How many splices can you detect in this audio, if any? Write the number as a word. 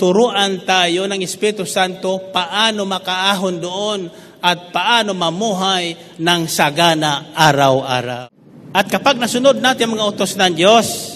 one